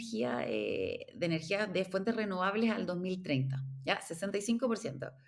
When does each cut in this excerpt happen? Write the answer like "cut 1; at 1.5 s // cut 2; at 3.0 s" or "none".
none